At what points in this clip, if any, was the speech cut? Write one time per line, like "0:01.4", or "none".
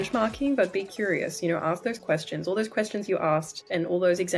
none